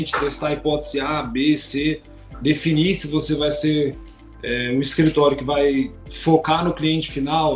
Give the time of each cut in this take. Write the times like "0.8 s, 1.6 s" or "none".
6.0 s